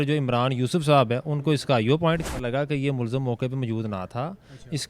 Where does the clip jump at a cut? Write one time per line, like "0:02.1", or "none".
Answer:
0:02.2